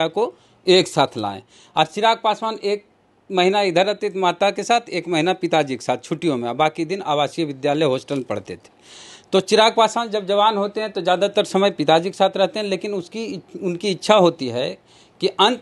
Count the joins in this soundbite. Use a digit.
0